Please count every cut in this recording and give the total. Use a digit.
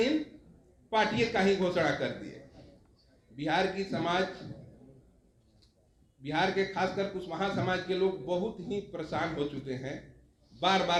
0